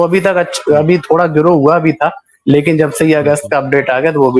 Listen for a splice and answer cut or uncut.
uncut